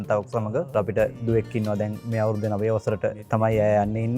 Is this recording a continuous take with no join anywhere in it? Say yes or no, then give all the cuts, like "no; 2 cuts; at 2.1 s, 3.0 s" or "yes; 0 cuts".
no; 3 cuts; at 1.1 s, 2.0 s, 3.2 s